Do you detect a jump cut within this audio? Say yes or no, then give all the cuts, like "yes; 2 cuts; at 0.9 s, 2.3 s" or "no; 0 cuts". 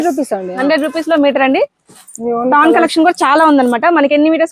no; 0 cuts